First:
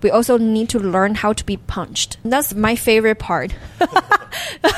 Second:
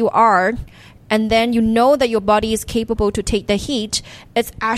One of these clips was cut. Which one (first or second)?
first